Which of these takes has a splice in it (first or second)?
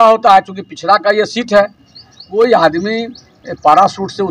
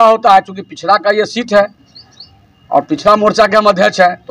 first